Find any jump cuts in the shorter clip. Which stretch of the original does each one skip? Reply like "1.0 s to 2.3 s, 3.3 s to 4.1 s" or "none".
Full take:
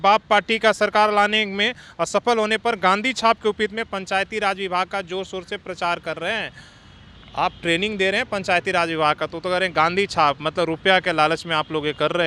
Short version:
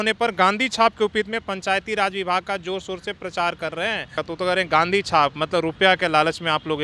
6.7 s to 9.3 s